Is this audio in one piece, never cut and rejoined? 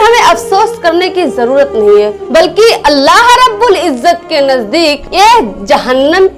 yes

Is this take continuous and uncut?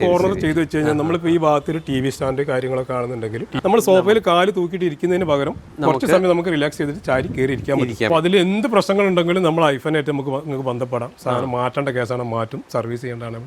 no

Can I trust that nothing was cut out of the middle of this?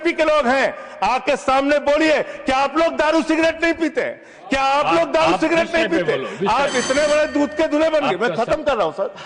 yes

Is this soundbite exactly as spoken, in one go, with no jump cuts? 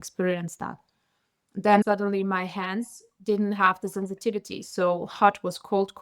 no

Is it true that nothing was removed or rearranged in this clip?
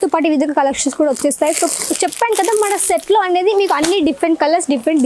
yes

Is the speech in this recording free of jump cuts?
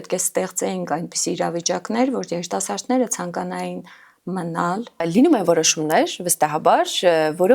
no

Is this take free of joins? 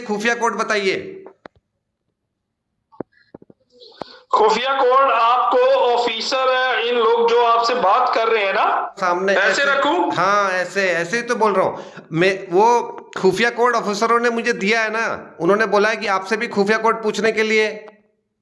no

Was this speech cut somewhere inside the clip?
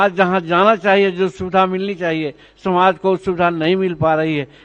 no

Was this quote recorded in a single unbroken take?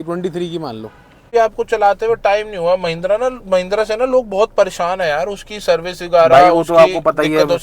no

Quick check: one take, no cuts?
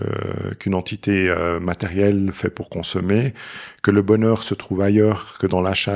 yes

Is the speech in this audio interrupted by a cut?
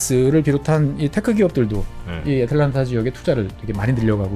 no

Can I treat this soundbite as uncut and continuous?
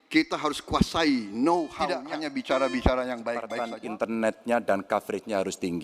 no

